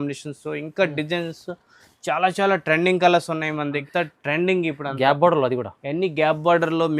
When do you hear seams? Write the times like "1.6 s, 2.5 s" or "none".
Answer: 3.8 s